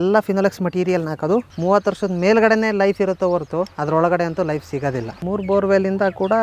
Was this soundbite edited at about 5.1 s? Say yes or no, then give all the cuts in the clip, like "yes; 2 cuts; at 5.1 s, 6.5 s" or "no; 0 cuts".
yes; 2 cuts; at 1.5 s, 5.1 s